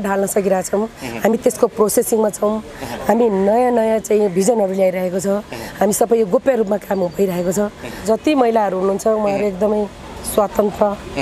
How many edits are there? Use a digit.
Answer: 1